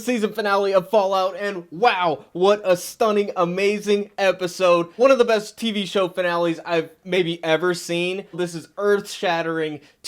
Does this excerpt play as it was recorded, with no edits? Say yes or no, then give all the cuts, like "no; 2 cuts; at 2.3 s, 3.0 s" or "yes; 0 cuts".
no; 2 cuts; at 4.9 s, 8.4 s